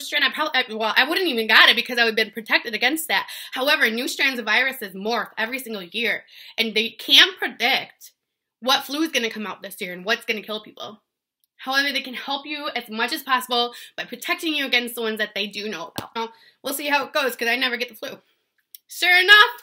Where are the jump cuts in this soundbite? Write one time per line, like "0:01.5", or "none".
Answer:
0:16.1